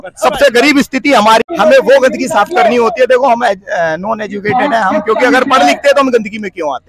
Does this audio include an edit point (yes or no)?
no